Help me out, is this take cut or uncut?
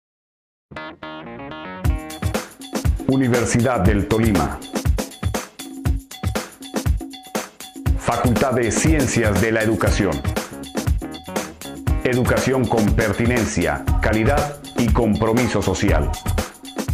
uncut